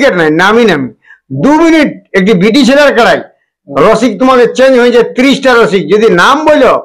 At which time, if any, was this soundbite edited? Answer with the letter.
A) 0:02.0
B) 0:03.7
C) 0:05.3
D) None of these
D